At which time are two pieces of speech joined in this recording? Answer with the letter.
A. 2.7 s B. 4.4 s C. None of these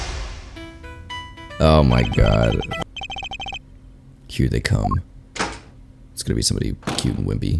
A